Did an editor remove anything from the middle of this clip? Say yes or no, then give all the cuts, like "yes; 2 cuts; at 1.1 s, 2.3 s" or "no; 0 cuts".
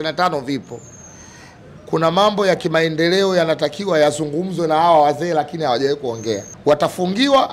yes; 1 cut; at 6.5 s